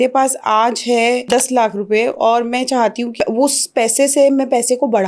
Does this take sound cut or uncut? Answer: cut